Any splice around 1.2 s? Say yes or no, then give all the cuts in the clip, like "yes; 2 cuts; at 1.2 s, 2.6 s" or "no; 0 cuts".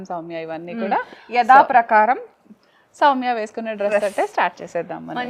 no; 0 cuts